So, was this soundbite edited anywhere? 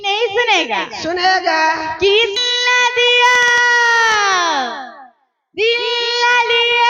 yes; 1 cut; at 2.4 s

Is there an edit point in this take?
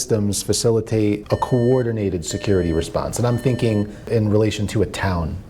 yes; 2 cuts; at 1.2 s, 4.1 s

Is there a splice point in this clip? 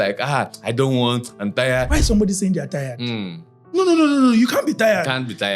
yes; 1 cut; at 1.9 s

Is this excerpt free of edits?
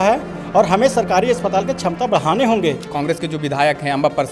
no; 1 cut; at 2.9 s

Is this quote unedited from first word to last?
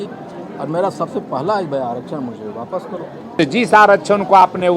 no; 1 cut; at 3.2 s

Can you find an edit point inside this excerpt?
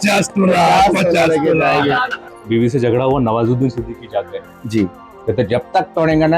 yes; 1 cut; at 2.2 s

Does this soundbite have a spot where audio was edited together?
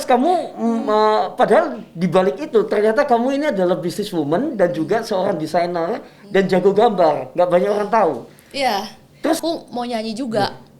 yes; 1 cut; at 9.4 s

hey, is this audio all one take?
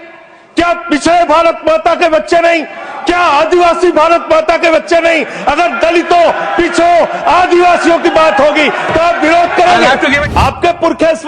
no; 1 cut; at 10.2 s

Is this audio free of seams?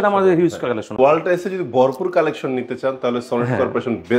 no; 1 cut; at 1.0 s

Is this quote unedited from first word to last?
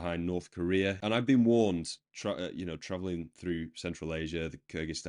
no; 1 cut; at 1.0 s

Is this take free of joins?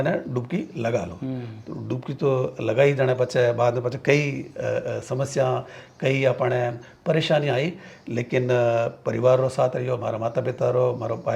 yes; 0 cuts

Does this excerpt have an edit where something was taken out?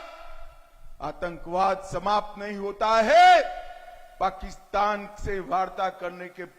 no; 0 cuts

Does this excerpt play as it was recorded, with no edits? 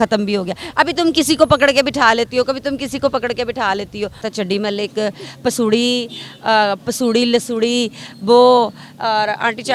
no; 1 cut; at 4.2 s

